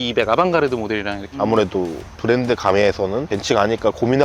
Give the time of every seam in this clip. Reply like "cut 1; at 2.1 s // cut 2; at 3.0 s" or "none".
cut 1; at 1.3 s // cut 2; at 3.3 s